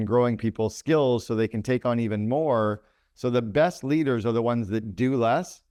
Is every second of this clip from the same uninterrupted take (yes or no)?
yes